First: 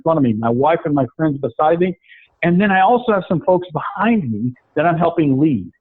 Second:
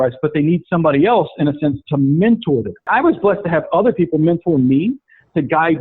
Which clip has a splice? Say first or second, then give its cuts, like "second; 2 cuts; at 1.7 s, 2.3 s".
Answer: second; 1 cut; at 2.9 s